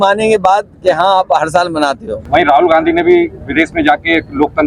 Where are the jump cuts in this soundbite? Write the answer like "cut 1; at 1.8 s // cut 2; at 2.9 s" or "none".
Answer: cut 1; at 2.1 s